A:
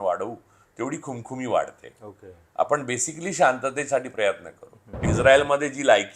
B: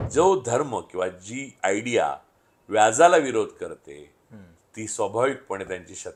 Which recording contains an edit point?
A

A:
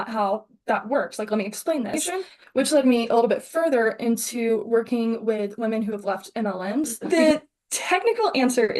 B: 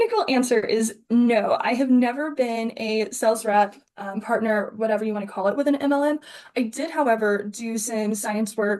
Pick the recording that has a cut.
A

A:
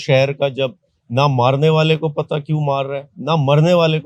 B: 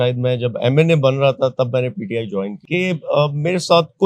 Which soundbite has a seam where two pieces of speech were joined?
B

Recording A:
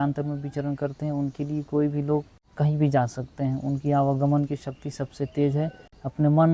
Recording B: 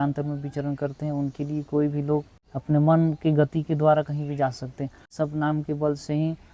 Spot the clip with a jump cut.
B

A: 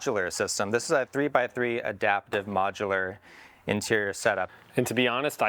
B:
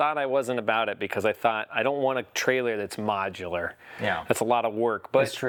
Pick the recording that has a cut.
A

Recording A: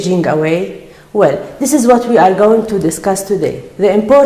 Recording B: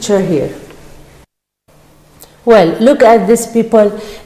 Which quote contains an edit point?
A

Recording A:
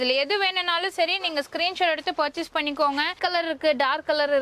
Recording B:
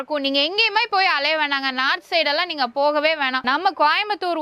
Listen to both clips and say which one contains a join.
A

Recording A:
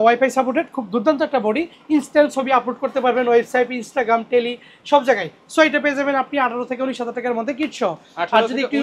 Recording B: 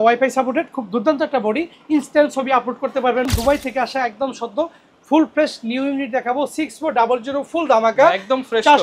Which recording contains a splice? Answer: B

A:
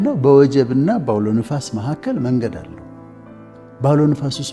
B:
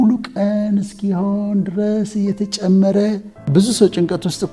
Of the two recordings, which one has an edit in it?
B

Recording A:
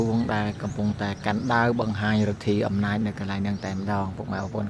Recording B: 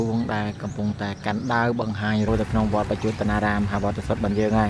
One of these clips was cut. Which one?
B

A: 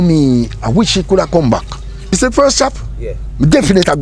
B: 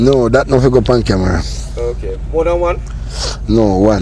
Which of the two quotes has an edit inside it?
A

